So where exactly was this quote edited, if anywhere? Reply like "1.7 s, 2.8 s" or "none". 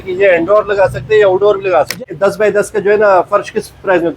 1.9 s